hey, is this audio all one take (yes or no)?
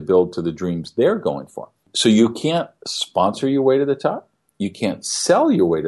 no